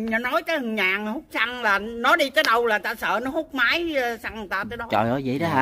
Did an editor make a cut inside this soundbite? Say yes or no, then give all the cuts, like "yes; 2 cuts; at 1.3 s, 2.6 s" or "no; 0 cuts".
no; 0 cuts